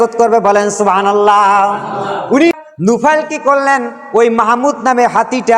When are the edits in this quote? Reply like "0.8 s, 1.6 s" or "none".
2.5 s